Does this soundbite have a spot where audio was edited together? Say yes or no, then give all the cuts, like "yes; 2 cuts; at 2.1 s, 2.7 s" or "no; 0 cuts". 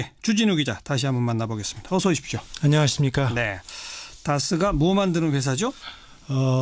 no; 0 cuts